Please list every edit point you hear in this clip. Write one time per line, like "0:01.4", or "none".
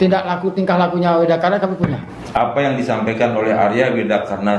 0:02.1